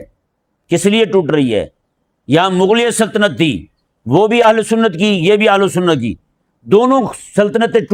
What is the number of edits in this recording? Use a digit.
0